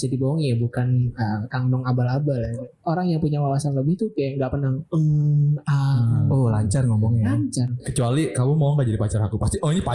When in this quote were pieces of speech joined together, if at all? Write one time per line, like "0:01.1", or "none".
0:02.6
0:07.8